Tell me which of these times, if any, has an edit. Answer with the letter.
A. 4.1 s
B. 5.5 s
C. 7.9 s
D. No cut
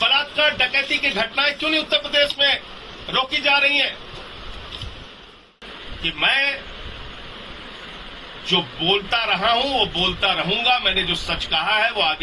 B